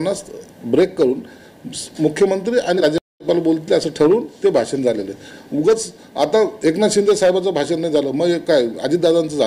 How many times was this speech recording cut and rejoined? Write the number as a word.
one